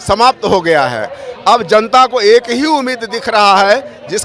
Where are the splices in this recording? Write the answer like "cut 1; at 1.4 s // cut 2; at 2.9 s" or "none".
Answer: none